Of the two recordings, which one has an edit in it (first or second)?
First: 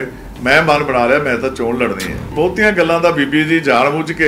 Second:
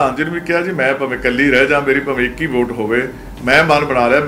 first